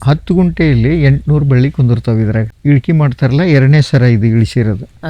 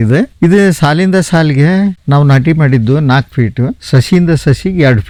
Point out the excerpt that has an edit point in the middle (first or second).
first